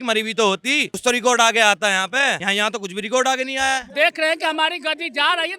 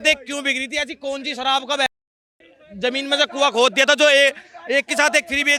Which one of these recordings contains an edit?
first; 3 cuts; at 1.0 s, 2.4 s, 3.9 s

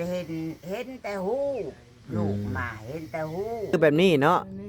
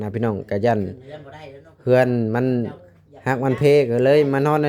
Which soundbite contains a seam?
first; 1 cut; at 3.7 s

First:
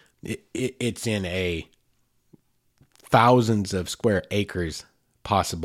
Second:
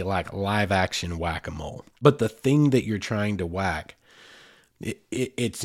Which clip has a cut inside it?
second; 1 cut; at 1.8 s

